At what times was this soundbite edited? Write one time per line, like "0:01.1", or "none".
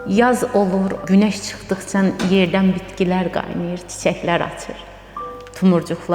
0:01.0

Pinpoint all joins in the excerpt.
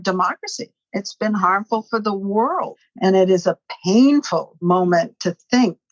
0:02.8
0:04.6

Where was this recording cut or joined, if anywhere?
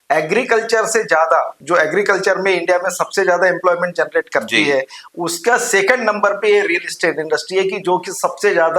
0:01.6

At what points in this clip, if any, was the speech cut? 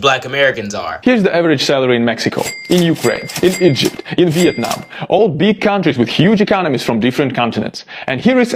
none

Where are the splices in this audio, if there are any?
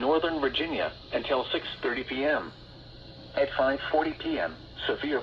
0:01.0
0:04.2

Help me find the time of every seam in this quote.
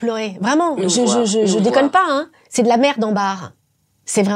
0:02.4

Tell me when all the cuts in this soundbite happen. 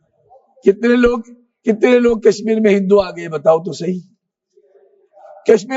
none

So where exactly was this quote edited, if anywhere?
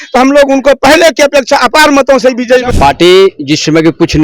0:02.7

